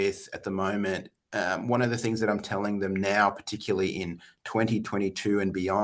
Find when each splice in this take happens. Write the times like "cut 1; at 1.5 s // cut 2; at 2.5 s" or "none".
none